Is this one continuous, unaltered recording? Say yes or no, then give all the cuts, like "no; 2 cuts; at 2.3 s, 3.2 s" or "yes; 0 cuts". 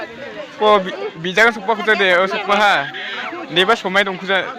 yes; 0 cuts